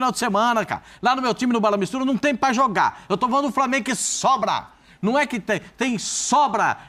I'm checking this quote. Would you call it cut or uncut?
uncut